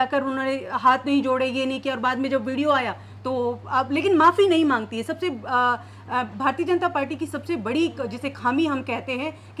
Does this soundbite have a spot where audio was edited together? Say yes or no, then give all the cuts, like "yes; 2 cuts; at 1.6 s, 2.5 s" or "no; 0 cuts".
no; 0 cuts